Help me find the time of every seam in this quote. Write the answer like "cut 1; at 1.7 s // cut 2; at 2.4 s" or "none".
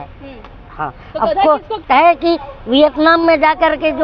cut 1; at 1.8 s